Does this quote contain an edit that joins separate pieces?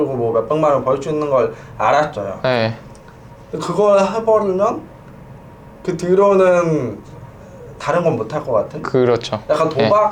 no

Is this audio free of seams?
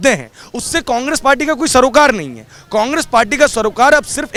yes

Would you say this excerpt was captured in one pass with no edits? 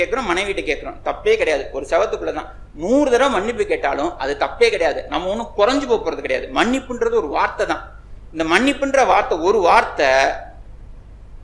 yes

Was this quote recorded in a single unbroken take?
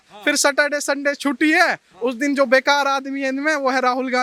yes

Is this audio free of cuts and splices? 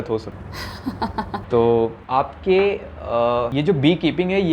yes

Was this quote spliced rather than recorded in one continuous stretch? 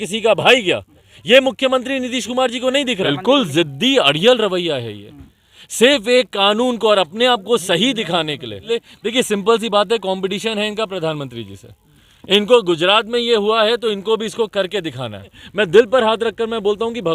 yes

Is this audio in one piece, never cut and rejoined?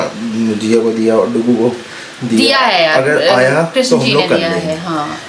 yes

